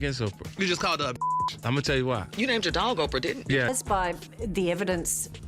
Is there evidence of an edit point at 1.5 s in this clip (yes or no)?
no